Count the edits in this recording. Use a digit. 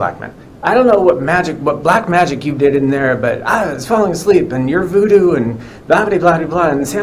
0